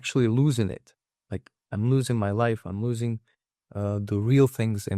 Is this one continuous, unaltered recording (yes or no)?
yes